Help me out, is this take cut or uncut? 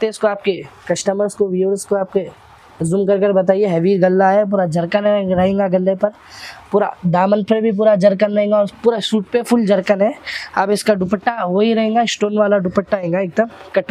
uncut